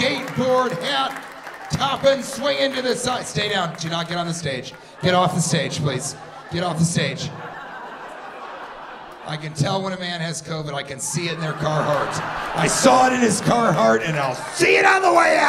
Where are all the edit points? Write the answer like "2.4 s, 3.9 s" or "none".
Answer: none